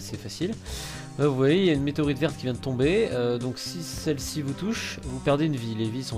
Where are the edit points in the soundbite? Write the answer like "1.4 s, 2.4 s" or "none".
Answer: none